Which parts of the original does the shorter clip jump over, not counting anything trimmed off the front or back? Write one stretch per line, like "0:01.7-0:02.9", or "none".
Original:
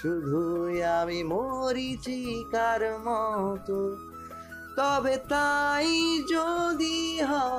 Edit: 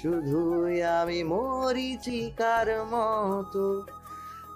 0:02.1-0:02.2